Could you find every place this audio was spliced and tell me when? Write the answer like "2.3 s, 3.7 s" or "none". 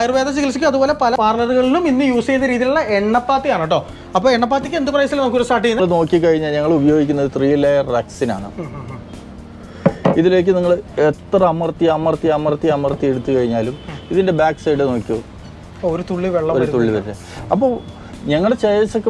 1.2 s, 5.8 s